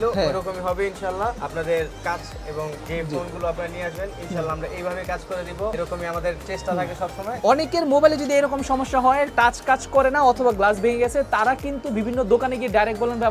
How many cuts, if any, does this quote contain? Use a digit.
4